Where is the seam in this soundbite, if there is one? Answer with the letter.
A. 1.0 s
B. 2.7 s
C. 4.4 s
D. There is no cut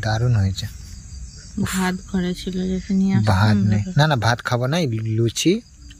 D